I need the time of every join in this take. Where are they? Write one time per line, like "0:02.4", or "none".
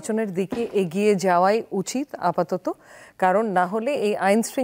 none